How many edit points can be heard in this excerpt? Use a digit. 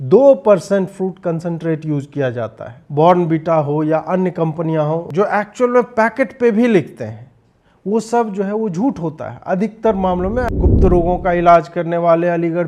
3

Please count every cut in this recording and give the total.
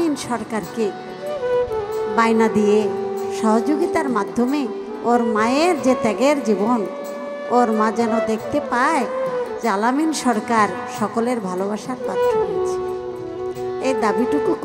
0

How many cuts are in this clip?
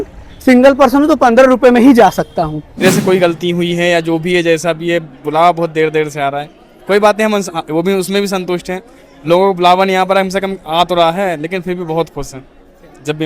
1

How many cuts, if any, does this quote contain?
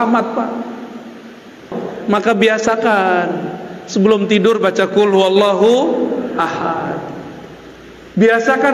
1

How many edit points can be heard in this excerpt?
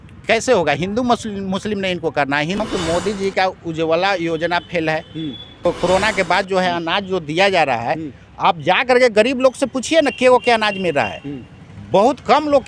2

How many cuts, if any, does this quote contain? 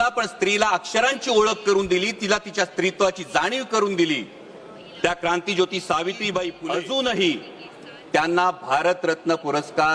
1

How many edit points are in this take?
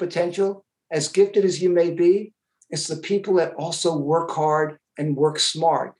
0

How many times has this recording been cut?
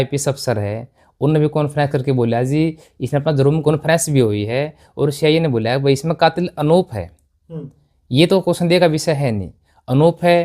2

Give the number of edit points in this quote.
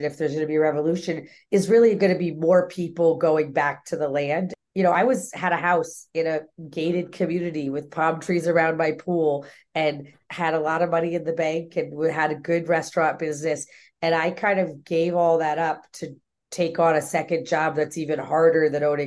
2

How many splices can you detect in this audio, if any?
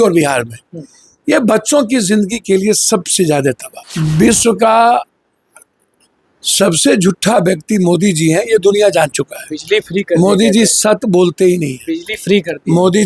1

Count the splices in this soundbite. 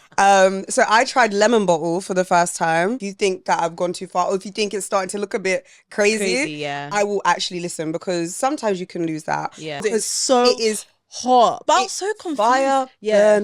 2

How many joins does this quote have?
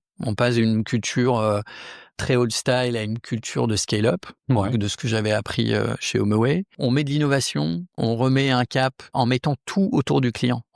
4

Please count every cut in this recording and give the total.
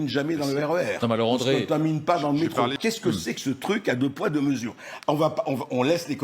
1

